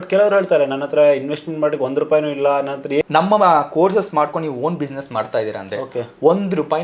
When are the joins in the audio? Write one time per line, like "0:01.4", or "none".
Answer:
0:03.0